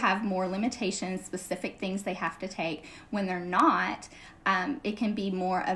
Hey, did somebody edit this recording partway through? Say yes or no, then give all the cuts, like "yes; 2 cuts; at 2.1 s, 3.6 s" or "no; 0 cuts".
no; 0 cuts